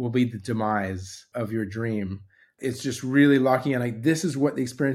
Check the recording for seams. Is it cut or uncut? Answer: cut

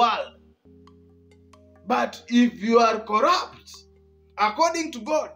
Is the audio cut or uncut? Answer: uncut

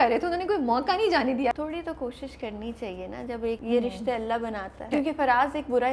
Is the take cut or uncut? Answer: cut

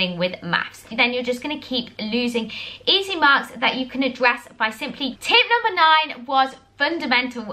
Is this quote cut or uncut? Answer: cut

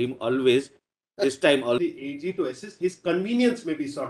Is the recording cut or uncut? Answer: cut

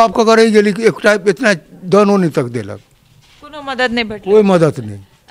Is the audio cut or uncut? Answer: uncut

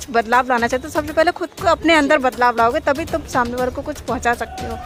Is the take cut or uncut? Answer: uncut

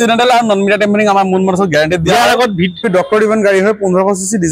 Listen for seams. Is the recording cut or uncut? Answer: cut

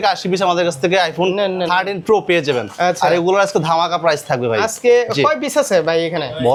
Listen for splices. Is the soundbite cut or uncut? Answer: uncut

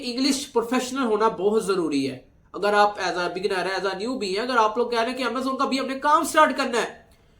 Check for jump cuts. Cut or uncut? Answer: uncut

